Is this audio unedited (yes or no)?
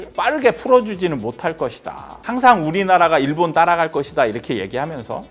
no